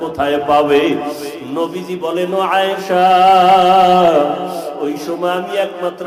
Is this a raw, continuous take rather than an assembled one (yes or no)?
yes